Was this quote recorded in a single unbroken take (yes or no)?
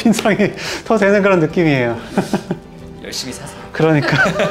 yes